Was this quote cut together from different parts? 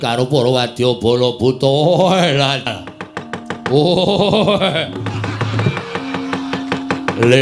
yes; 1 cut; at 2.7 s

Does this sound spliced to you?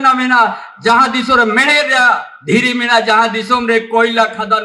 yes; 1 cut; at 2.3 s

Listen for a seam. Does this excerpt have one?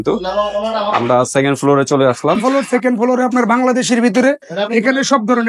yes; 1 cut; at 2.4 s

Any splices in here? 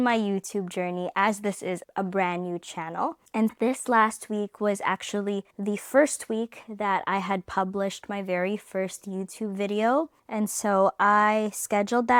no; 0 cuts

